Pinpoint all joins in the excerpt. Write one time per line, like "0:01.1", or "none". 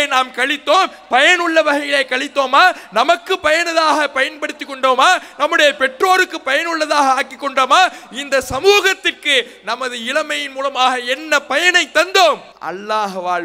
0:12.5